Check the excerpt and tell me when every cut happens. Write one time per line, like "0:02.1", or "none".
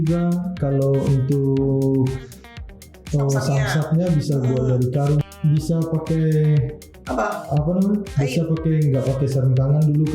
0:05.2